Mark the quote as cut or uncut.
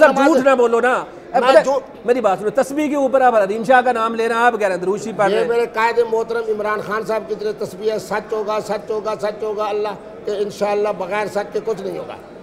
uncut